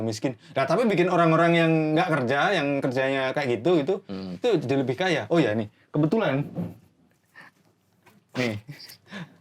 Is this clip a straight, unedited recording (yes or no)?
yes